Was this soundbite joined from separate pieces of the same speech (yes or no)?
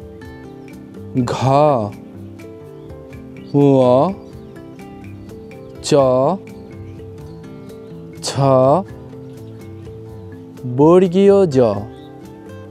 no